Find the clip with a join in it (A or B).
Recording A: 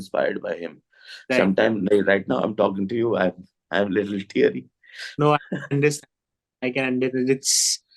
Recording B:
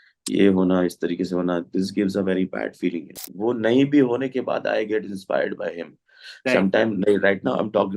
B